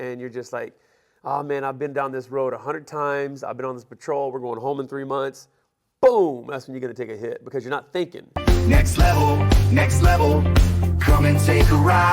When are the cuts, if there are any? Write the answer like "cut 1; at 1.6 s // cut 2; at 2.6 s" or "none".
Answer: cut 1; at 8.4 s